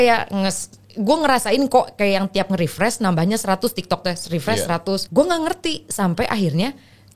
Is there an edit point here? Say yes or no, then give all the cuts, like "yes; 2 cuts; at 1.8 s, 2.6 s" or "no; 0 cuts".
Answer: yes; 1 cut; at 5.1 s